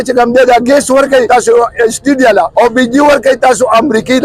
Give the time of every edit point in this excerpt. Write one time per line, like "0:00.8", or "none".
0:01.3
0:02.5